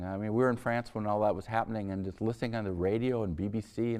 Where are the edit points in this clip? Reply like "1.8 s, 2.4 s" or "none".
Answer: 1.0 s

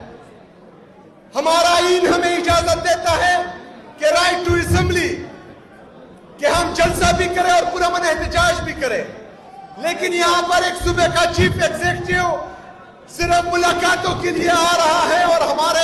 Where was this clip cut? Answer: none

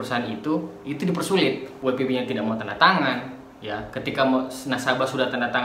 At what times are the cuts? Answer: 1.7 s

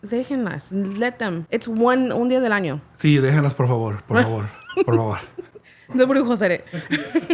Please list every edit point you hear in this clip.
1.4 s

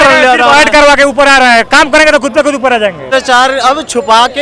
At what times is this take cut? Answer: 3.0 s

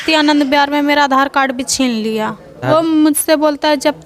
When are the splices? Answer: 2.6 s

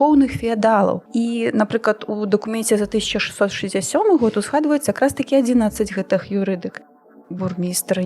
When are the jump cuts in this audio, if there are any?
1.0 s, 7.0 s

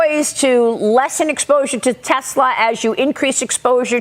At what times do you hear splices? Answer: none

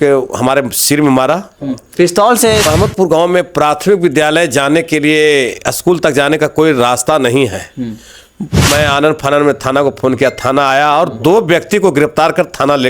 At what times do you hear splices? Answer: 2.7 s, 8.7 s

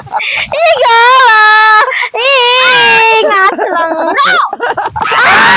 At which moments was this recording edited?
none

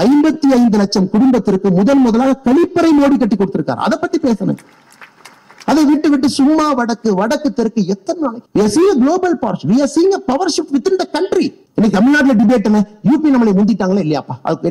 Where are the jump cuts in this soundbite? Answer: 8.4 s

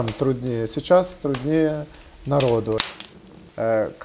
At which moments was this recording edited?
2.9 s

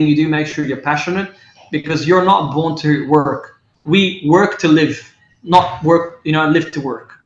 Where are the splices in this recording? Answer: none

